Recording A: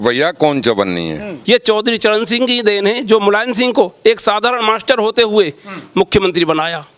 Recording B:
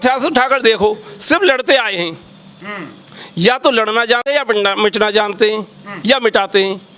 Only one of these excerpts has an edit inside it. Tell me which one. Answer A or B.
A